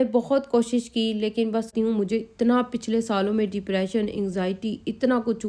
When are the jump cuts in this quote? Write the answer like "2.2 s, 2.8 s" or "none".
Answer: 1.7 s